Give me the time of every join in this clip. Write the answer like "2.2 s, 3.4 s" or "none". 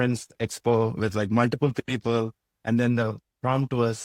none